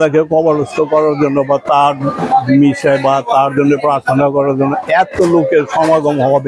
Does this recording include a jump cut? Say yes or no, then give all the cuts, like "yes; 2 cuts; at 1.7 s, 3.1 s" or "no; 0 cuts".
no; 0 cuts